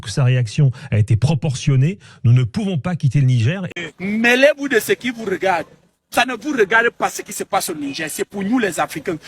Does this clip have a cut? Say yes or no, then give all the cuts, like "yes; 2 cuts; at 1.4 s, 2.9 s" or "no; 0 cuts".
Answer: yes; 1 cut; at 3.7 s